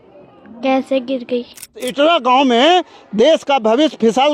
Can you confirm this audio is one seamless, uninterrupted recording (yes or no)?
no